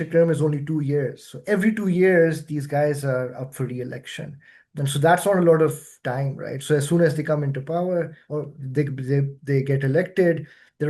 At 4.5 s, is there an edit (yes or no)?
no